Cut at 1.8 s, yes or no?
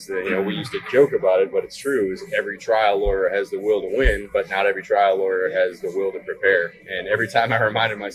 no